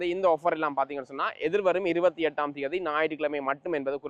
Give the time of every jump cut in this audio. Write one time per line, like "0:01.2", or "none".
none